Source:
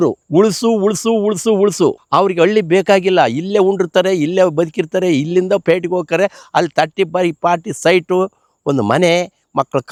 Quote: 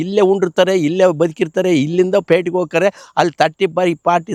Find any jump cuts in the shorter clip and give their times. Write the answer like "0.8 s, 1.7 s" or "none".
none